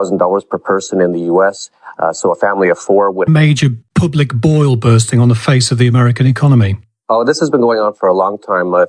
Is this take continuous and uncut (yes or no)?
yes